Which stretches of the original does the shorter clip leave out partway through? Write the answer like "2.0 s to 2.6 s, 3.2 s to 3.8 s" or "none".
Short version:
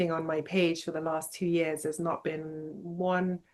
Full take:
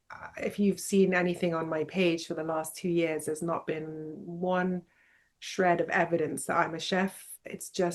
none